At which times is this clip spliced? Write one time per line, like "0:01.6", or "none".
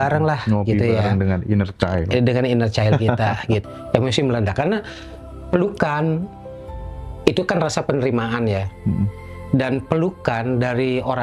0:03.6

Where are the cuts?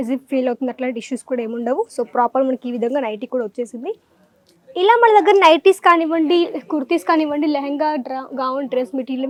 none

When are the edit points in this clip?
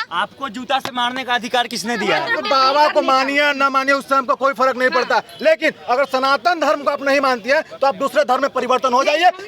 0:02.3

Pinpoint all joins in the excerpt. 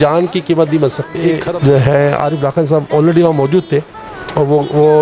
0:01.5

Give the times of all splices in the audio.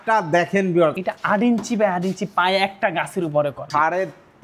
0:01.0
0:03.7

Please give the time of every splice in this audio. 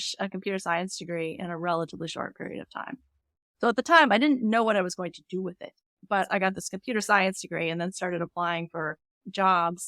0:06.3

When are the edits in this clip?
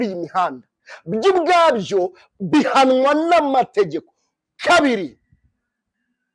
none

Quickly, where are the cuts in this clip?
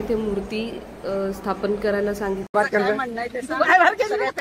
0:02.5

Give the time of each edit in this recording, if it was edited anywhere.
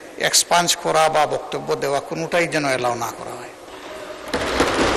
none

